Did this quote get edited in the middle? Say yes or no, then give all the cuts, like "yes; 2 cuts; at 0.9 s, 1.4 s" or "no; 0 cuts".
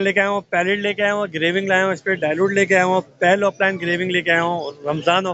no; 0 cuts